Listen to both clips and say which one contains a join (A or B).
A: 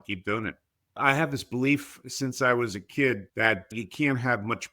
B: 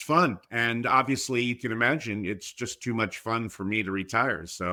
A